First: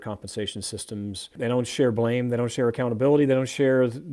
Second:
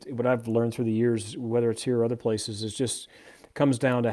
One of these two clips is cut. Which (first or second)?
first